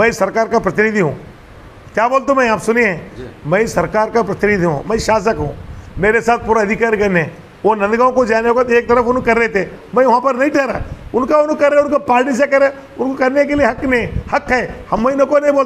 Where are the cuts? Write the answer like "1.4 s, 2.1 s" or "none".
none